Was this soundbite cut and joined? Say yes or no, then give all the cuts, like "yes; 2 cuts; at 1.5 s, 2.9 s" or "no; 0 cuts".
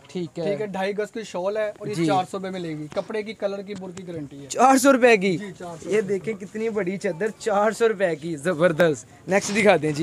no; 0 cuts